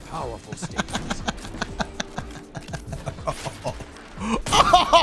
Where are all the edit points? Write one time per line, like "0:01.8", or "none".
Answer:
none